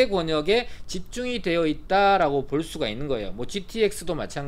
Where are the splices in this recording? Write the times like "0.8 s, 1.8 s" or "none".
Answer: none